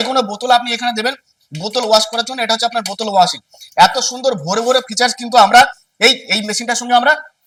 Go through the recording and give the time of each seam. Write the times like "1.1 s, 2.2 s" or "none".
none

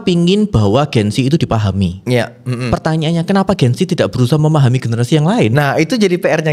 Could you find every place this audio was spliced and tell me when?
none

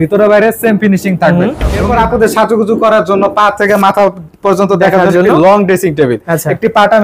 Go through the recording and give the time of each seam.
1.7 s

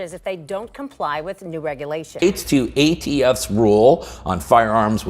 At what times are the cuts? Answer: 2.1 s

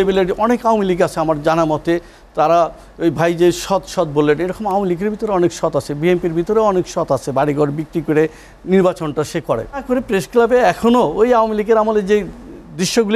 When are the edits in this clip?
9.8 s

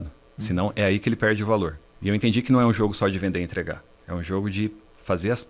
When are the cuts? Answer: 1.9 s, 3.9 s

